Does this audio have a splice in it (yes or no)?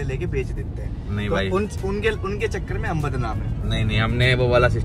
no